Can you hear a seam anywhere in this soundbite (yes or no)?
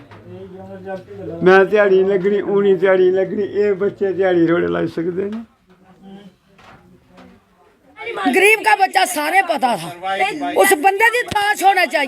yes